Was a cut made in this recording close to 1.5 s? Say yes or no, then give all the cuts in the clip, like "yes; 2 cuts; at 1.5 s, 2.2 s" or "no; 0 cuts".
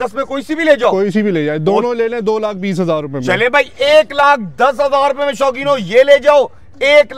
no; 0 cuts